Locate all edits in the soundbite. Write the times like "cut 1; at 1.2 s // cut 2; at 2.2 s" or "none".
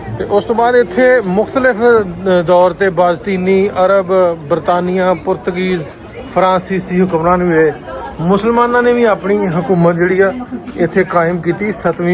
none